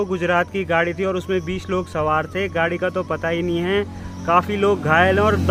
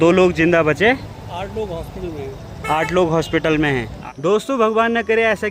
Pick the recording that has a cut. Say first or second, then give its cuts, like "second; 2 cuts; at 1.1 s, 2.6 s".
second; 1 cut; at 4.0 s